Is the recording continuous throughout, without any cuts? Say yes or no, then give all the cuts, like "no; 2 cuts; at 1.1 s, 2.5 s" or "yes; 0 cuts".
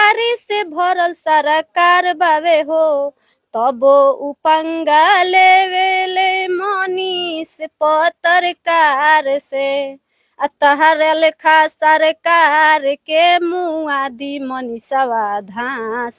yes; 0 cuts